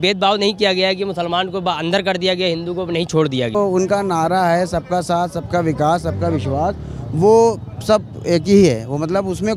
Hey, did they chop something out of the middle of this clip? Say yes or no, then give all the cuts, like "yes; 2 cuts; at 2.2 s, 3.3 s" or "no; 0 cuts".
yes; 1 cut; at 3.5 s